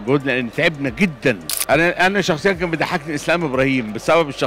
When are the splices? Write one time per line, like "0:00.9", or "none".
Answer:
0:01.5